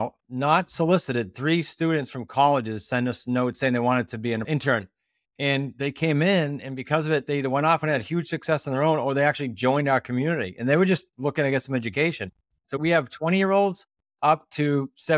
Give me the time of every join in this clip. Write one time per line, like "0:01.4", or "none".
0:04.4
0:12.8